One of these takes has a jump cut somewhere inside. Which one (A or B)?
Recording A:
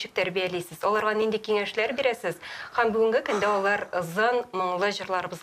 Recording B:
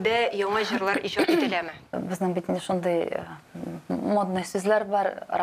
B